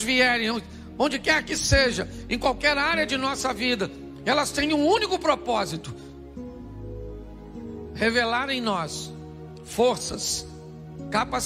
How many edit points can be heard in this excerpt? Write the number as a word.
two